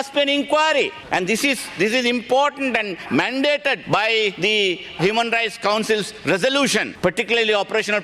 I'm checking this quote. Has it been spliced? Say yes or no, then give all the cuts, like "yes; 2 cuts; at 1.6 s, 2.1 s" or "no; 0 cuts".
yes; 3 cuts; at 1.0 s, 4.1 s, 6.9 s